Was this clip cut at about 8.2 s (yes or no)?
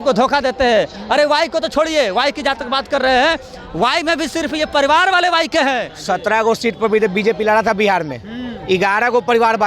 no